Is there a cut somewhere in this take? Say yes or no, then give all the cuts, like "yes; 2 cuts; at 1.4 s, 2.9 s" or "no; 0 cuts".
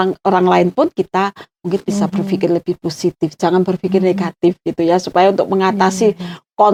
no; 0 cuts